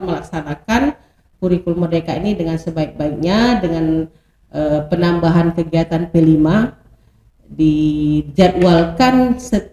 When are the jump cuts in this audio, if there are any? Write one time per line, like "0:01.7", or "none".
none